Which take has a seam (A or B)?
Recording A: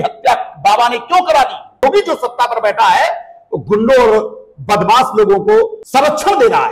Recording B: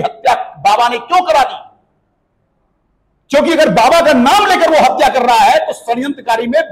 A